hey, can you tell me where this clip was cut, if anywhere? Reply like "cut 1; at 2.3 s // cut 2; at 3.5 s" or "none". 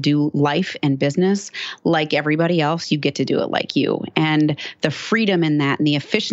none